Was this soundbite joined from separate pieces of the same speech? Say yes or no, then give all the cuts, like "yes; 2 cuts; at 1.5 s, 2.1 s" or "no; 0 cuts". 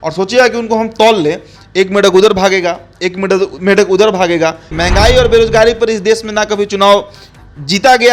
yes; 1 cut; at 4.7 s